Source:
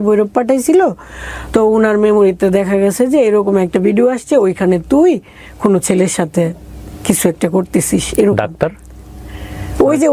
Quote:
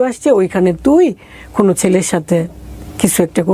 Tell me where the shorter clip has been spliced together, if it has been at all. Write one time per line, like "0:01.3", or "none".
none